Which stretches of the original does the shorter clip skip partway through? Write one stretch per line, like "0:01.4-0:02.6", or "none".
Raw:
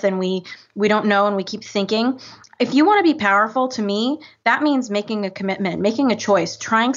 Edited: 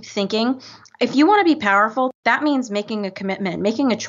0:03.7-0:04.3